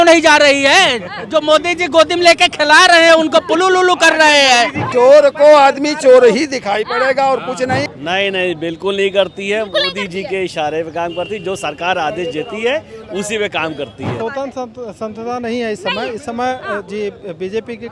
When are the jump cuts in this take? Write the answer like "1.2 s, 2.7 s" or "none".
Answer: 4.9 s, 7.9 s, 14.1 s